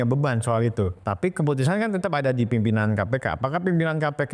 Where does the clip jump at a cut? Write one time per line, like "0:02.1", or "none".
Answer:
0:01.0